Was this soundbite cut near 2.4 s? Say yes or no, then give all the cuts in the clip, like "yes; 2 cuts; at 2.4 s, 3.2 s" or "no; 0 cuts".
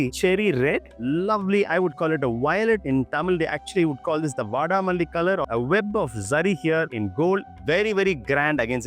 no; 2 cuts; at 1.0 s, 5.4 s